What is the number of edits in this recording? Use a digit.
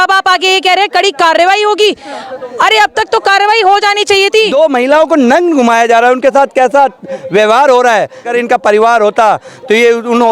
2